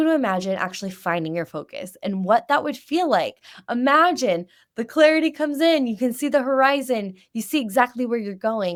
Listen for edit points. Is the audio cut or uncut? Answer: uncut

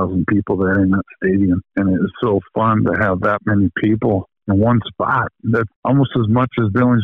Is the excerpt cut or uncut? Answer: cut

